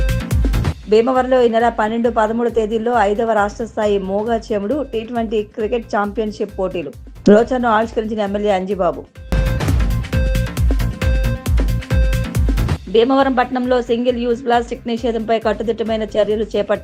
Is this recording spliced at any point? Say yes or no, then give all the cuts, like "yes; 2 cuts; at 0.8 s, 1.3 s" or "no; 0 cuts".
no; 0 cuts